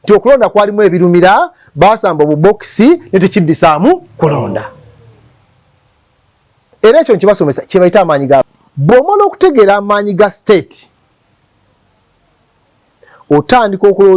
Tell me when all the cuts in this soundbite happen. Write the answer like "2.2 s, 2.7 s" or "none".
8.6 s